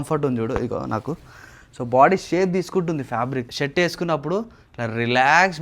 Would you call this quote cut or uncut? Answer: cut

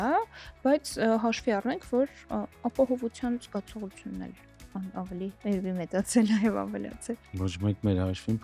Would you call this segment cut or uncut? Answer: uncut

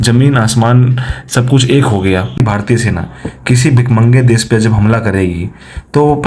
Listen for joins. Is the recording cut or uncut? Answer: cut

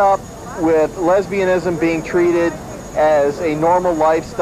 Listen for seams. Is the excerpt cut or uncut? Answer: uncut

